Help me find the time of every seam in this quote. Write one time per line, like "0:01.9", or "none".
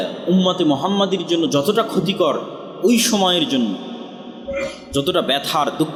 none